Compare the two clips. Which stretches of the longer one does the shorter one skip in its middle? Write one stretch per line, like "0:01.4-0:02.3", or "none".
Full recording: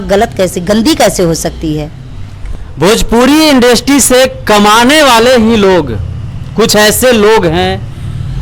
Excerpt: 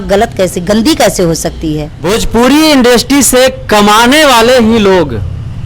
0:01.9-0:02.7